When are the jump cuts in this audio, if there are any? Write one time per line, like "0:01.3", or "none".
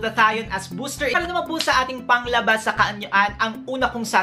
0:01.1